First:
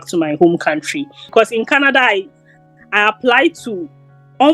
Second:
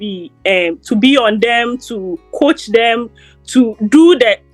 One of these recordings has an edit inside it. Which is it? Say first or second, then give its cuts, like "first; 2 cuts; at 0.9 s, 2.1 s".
first; 1 cut; at 1.2 s